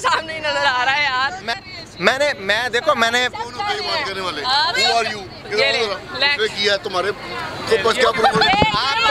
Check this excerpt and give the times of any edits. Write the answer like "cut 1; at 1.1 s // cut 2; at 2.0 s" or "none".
cut 1; at 1.6 s